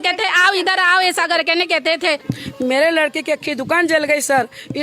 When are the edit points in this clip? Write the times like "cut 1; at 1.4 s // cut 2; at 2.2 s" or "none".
cut 1; at 2.2 s